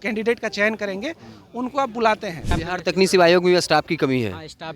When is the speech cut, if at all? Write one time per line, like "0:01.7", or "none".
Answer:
0:02.5